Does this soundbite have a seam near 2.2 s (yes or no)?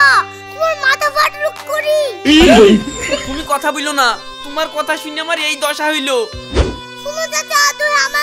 no